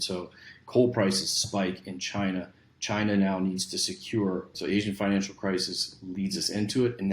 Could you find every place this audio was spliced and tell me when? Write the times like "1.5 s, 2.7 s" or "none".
4.5 s